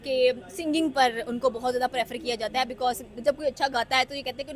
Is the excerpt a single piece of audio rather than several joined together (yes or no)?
yes